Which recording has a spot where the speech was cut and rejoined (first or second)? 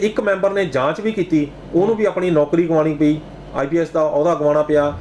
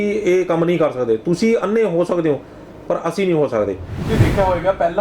second